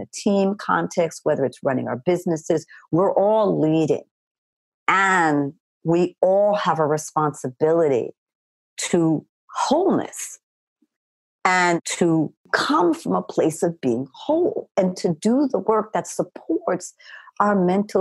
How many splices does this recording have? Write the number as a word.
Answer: two